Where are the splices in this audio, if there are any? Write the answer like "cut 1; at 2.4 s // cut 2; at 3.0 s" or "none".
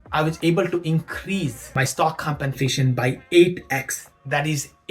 cut 1; at 1.6 s